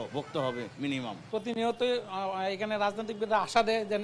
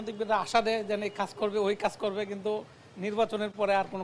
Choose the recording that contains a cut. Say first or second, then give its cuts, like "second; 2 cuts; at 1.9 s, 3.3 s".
first; 1 cut; at 1.2 s